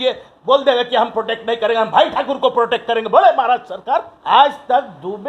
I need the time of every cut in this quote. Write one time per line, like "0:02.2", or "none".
0:04.1

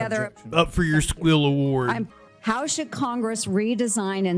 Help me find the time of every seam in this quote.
0:02.1

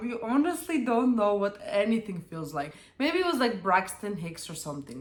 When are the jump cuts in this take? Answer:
none

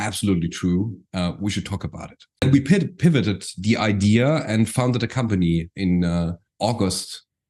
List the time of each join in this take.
0:02.4

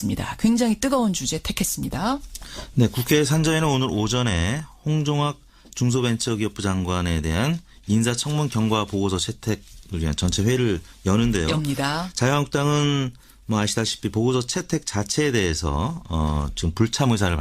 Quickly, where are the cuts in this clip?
0:08.3

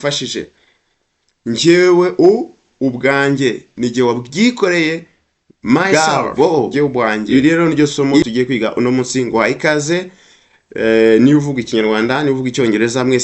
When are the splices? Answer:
0:05.9

